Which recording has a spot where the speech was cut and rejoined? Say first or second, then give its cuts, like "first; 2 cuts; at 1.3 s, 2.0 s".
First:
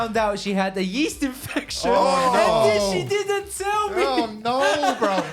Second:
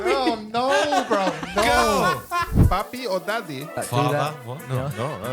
second; 2 cuts; at 2.6 s, 3.7 s